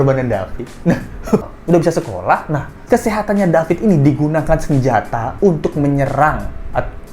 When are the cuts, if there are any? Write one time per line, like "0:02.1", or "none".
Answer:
0:01.4